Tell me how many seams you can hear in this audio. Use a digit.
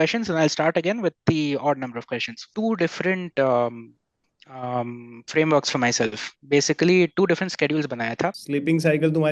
2